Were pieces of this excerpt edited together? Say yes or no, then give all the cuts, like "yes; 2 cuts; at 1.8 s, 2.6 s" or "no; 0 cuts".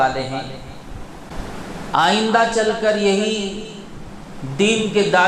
yes; 1 cut; at 1.3 s